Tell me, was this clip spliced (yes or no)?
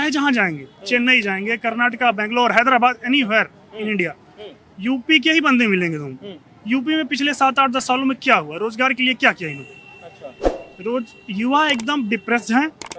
no